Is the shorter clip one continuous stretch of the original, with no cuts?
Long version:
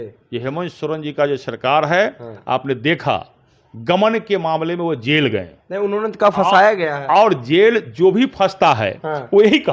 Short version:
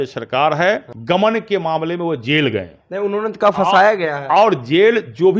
no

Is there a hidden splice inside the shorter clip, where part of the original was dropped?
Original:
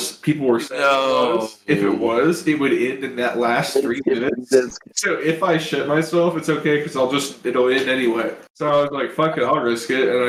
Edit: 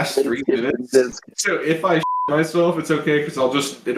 no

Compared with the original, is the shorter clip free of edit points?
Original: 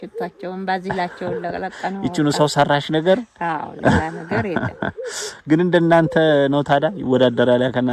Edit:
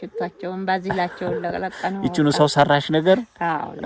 yes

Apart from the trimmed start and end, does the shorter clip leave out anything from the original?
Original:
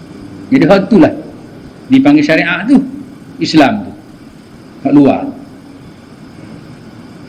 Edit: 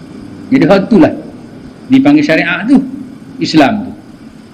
no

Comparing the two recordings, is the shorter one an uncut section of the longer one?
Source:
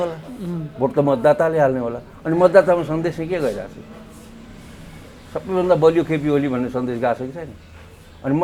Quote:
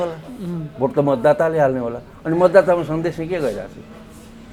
yes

